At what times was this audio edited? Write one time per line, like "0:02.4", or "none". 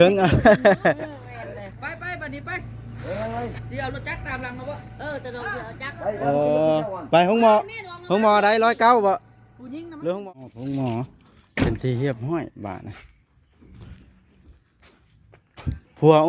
0:10.2